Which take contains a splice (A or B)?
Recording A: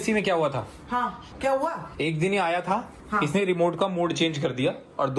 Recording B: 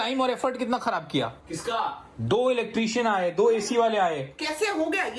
A